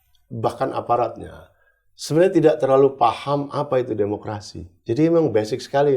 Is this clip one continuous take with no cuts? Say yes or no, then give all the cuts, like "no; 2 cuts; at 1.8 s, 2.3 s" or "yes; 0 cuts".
yes; 0 cuts